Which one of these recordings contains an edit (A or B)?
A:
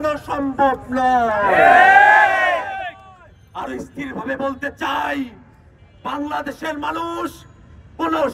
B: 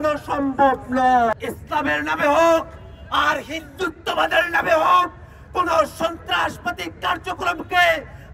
B